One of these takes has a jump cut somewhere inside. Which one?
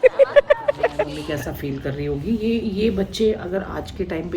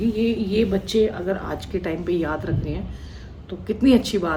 first; 1 cut; at 0.9 s

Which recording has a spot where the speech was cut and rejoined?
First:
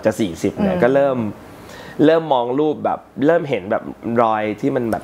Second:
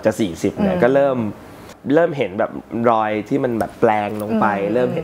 second; 1 cut; at 1.7 s

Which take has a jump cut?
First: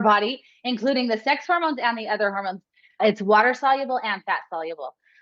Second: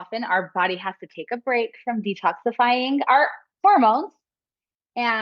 first; 1 cut; at 3.0 s

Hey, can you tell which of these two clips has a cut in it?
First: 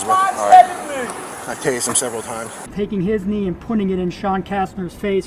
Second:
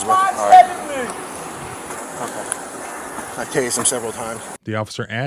first; 2 cuts; at 1.3 s, 2.6 s

